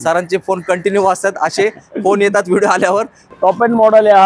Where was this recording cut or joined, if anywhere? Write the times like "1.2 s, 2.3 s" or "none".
3.2 s